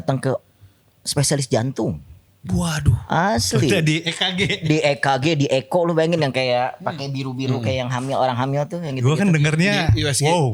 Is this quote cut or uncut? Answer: uncut